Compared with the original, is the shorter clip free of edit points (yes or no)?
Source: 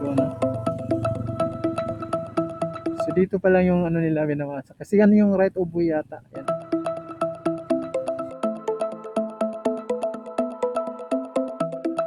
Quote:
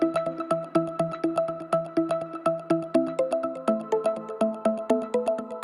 no